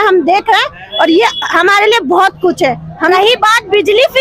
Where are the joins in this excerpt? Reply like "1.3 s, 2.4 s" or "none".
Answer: 3.1 s

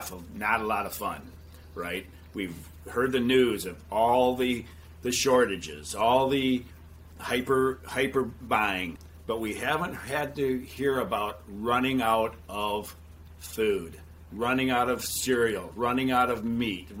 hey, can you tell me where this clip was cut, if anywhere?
8.9 s

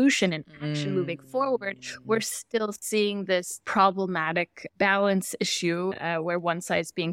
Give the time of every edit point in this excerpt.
3.5 s, 4.6 s, 5.9 s

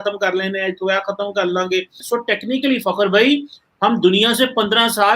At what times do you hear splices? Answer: 2.0 s

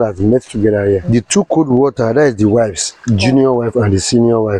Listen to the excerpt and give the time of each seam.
none

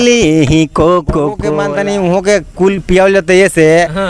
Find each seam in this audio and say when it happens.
1.5 s

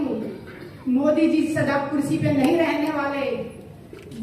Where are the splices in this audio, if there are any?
none

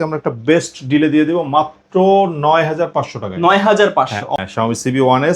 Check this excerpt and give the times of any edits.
4.3 s

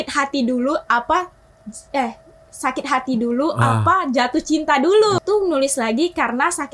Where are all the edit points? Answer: 5.2 s

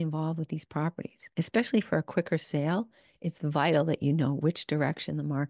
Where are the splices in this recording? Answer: 1.2 s

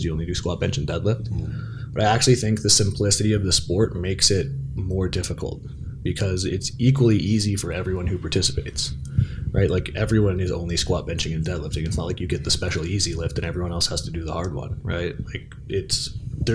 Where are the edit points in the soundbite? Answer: none

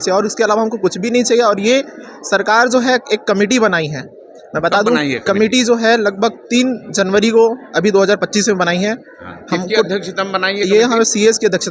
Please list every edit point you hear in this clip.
none

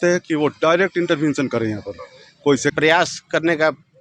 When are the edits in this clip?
2.7 s

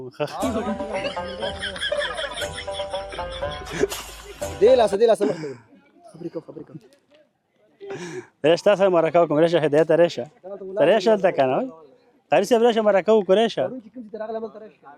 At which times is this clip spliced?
none

